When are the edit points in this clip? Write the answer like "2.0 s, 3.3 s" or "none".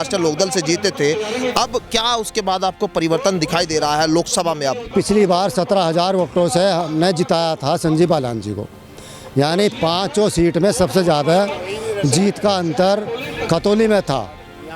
4.9 s

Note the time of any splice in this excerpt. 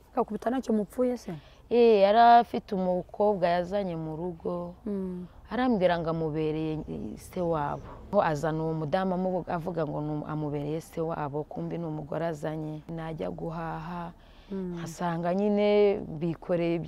8.1 s, 12.9 s

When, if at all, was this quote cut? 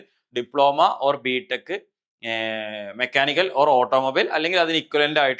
none

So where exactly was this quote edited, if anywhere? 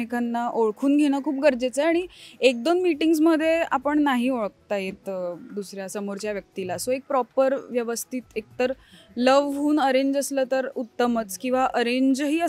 none

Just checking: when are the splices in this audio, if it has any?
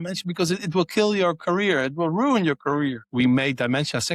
3.1 s

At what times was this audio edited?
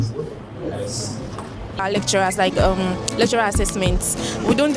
1.8 s

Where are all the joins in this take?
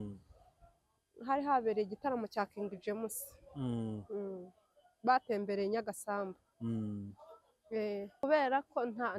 8.1 s

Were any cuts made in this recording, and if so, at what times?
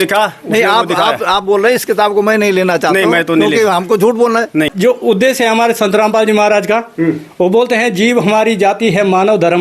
4.7 s

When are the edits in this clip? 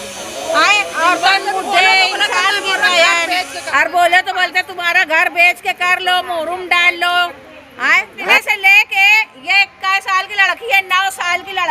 3.6 s, 8.4 s

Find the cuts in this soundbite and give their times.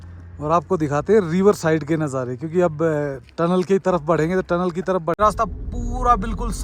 5.2 s

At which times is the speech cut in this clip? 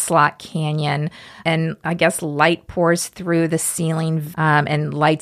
4.2 s

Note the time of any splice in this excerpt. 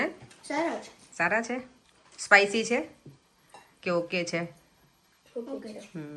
none

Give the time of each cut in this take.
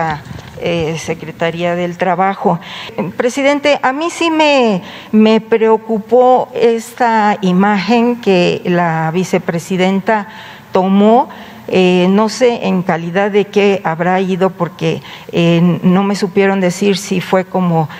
2.9 s

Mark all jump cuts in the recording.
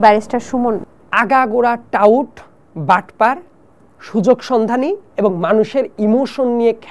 0.9 s

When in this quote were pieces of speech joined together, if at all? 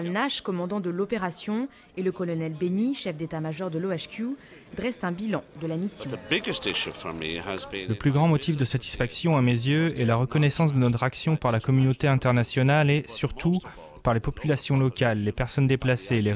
6.1 s, 7.8 s

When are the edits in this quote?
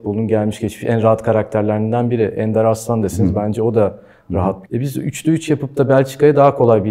4.6 s

